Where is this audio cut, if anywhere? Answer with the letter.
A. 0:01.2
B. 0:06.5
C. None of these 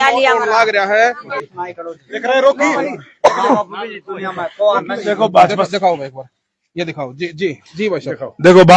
A